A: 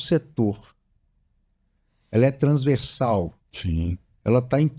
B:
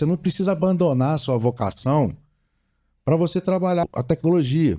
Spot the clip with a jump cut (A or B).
B